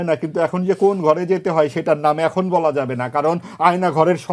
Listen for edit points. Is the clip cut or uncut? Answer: uncut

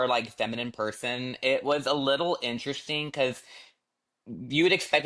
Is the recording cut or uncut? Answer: uncut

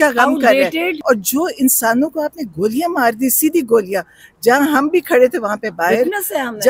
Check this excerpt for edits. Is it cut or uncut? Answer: cut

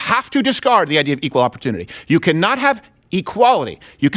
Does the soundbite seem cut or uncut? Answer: uncut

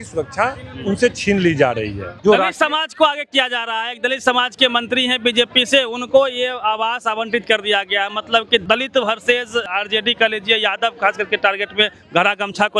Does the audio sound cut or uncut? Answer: cut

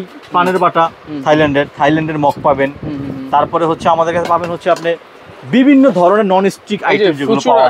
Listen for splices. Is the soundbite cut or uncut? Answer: uncut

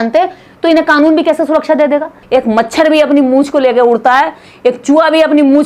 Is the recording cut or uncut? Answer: cut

